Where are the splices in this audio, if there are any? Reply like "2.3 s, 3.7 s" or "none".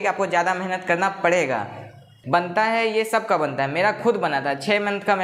2.1 s